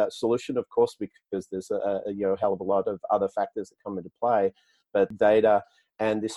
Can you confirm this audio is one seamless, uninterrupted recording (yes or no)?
no